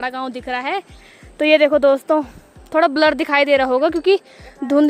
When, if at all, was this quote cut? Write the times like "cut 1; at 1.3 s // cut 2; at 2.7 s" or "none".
none

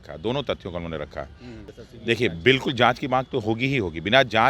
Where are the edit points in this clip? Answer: cut 1; at 1.6 s

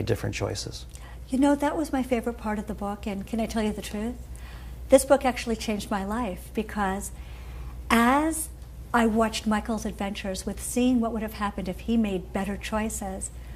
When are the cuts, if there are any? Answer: none

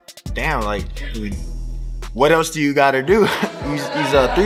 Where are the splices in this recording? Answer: none

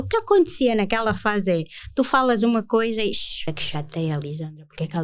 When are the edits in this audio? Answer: cut 1; at 3.5 s

